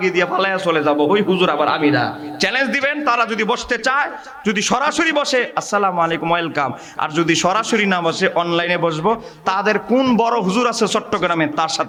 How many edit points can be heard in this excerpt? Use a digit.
0